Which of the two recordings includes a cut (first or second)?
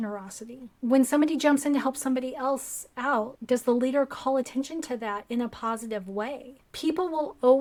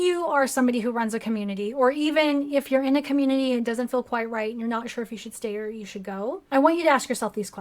second